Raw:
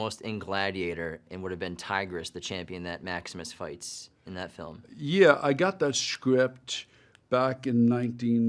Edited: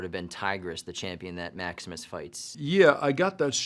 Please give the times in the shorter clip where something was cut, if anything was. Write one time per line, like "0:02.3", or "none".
0:02.4